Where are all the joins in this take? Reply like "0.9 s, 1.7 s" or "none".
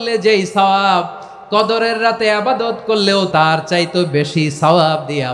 3.3 s